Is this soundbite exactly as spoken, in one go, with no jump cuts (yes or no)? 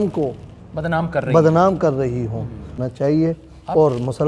no